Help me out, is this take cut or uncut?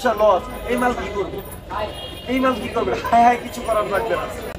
uncut